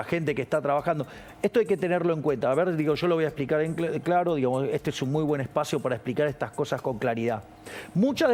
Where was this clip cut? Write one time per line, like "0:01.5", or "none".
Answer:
none